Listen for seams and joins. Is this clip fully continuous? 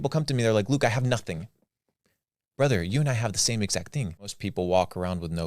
no; 1 cut; at 4.4 s

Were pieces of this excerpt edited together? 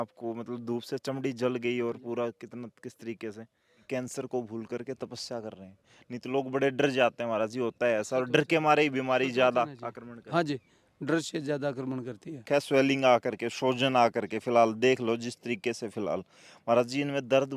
yes; 2 cuts; at 3.7 s, 12.4 s

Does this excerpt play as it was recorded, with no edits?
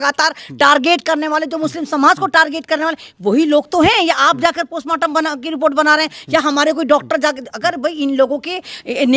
yes; 0 cuts

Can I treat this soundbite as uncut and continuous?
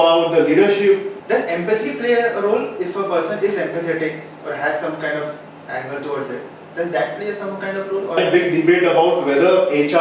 no; 2 cuts; at 1.1 s, 8.2 s

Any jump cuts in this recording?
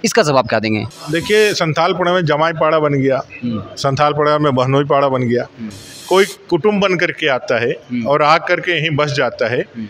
no; 0 cuts

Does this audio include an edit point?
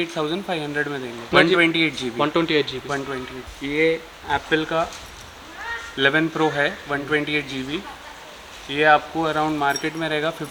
no; 0 cuts

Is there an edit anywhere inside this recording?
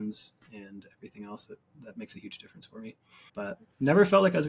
yes; 2 cuts; at 1.7 s, 3.1 s

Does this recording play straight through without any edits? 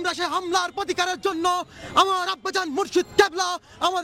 yes; 0 cuts

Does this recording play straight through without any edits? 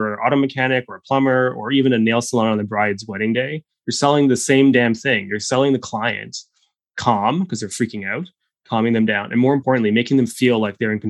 no; 1 cut; at 9.6 s

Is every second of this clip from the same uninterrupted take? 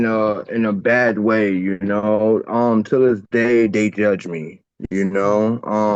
yes; 0 cuts

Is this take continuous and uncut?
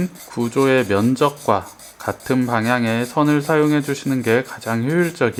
yes; 0 cuts

